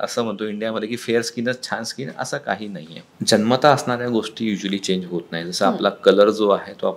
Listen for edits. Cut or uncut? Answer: cut